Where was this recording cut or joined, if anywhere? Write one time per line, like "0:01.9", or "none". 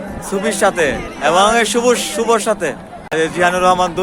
0:03.1